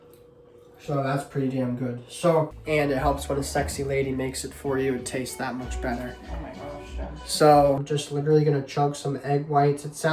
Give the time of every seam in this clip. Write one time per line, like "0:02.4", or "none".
0:02.6
0:07.8